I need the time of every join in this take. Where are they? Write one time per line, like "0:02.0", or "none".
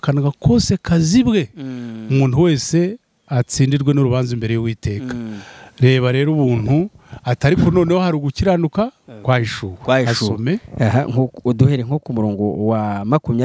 none